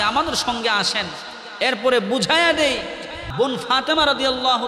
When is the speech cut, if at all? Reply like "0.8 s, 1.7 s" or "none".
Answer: 3.1 s